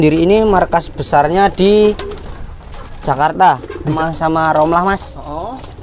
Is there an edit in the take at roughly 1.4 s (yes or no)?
no